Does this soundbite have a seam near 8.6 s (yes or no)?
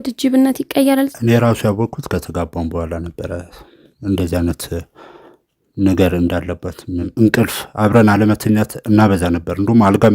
no